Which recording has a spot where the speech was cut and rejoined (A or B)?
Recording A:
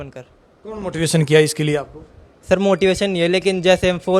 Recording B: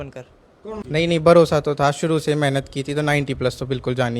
B